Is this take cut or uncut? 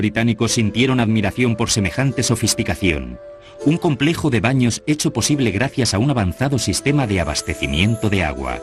cut